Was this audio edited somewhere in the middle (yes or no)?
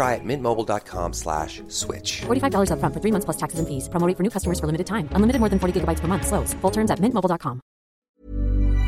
yes